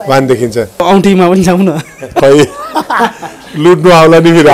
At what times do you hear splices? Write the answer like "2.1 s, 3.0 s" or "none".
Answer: 0.8 s, 2.2 s